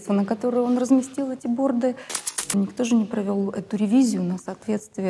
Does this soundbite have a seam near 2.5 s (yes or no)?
yes